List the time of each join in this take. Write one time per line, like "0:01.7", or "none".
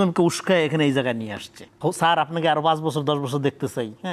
0:01.8